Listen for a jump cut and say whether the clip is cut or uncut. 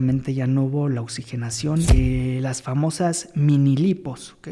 cut